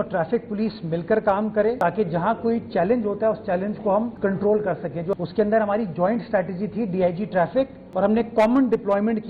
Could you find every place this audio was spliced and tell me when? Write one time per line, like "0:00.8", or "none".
0:01.8
0:05.1
0:07.8

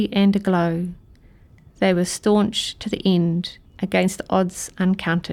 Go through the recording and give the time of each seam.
0:03.6

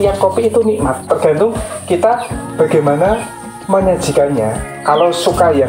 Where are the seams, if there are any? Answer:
0:01.1

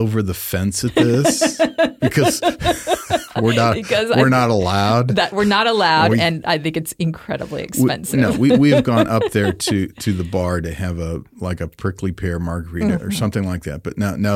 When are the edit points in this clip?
none

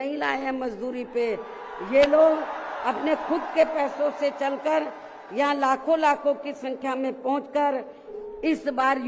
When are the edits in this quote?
0:08.1

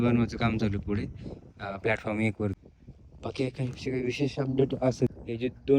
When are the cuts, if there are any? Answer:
0:02.6
0:05.1

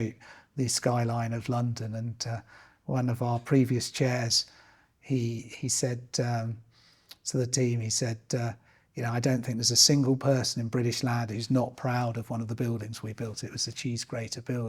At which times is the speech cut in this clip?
none

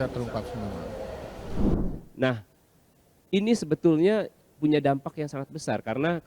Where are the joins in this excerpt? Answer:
0:01.7

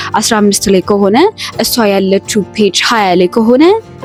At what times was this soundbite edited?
none

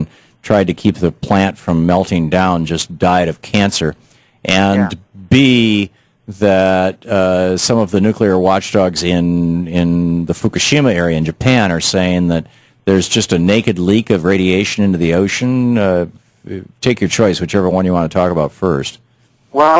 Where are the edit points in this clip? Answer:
0:06.5

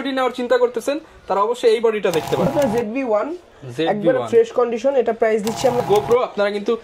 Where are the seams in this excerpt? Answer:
0:02.5
0:05.8

